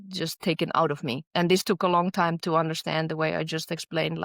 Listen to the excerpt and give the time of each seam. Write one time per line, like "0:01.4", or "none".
0:01.2